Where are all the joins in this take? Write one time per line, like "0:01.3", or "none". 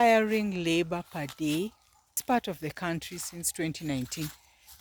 0:02.2